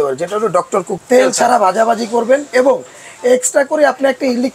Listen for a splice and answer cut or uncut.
cut